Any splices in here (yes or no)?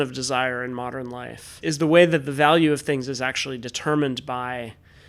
yes